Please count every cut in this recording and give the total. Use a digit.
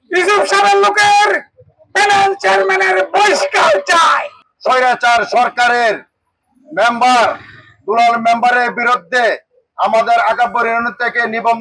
1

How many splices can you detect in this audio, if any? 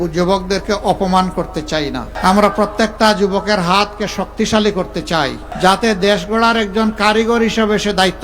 2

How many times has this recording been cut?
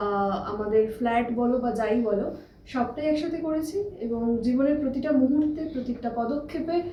0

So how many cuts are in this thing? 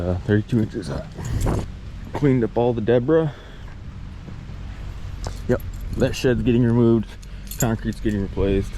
1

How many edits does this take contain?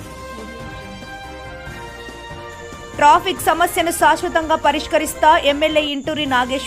1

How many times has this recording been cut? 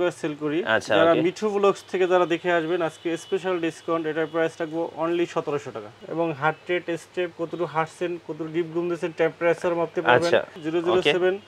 2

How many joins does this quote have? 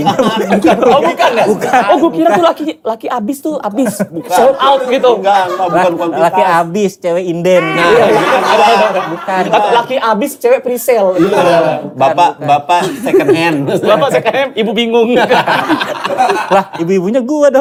0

